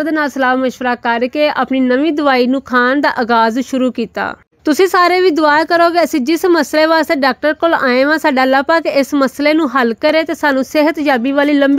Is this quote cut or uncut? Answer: uncut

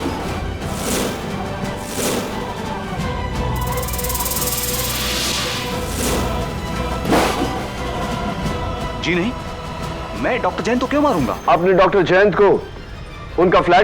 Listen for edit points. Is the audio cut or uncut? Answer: cut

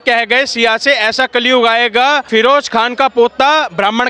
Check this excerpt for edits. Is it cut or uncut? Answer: cut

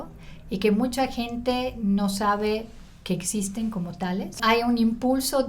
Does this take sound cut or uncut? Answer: cut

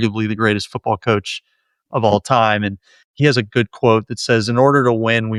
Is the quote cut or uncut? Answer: uncut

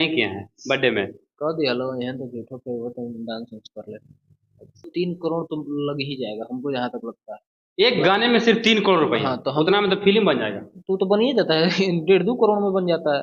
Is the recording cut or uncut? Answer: cut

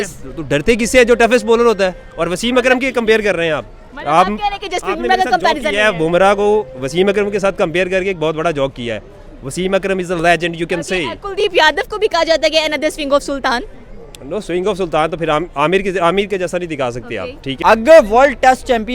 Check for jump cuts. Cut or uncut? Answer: cut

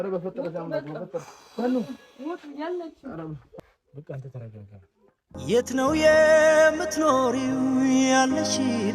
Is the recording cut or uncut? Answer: cut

